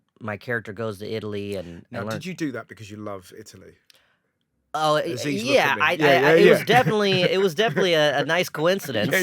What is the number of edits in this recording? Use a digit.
0